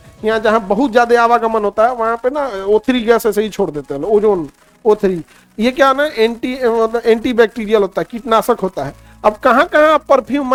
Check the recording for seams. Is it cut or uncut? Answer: uncut